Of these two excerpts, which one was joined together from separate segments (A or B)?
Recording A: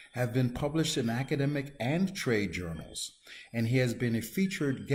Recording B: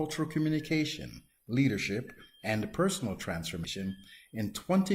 B